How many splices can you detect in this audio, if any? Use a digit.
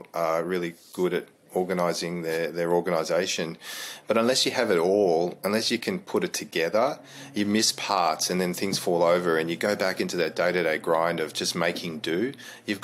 0